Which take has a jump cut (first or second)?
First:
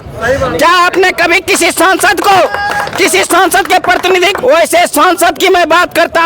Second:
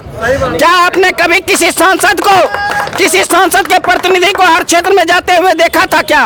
first